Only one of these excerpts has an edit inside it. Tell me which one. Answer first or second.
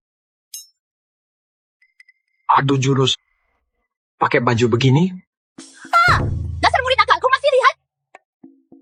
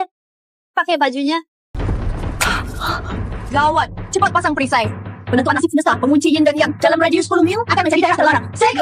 second